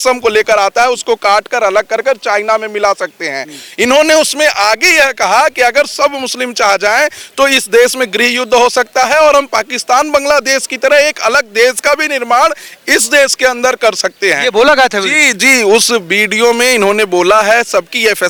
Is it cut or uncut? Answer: uncut